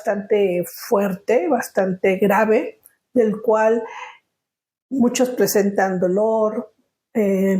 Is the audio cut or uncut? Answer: uncut